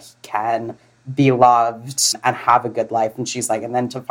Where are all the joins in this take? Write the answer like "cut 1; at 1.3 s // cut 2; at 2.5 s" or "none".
cut 1; at 2.1 s